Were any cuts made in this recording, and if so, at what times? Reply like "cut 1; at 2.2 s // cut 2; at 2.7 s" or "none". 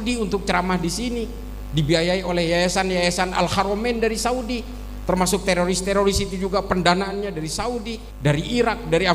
cut 1; at 8.0 s